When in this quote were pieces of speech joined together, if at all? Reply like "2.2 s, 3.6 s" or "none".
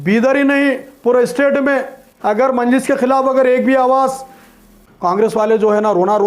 4.8 s